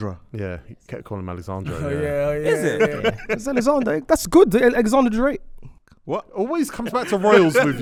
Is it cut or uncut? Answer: uncut